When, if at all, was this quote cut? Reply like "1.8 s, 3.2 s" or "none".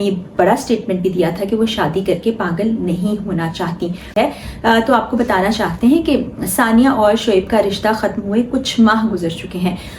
4.0 s